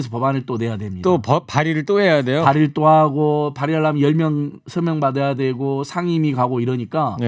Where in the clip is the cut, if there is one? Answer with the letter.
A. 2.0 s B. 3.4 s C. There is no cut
C